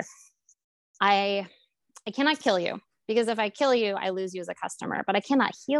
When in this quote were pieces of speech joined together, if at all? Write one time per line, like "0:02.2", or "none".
none